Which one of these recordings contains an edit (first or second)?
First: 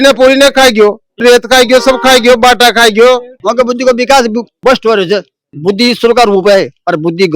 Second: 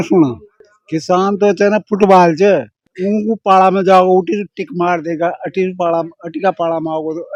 first